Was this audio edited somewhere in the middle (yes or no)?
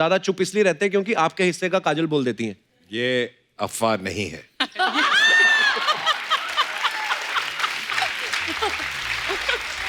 no